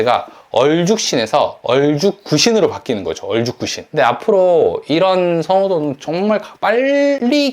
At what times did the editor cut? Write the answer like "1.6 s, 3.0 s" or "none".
3.8 s